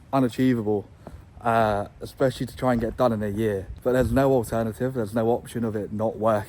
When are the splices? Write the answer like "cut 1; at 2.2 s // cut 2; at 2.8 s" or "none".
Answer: cut 1; at 3.7 s